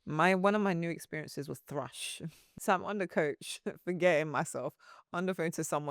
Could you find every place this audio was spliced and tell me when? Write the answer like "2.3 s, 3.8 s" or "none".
2.5 s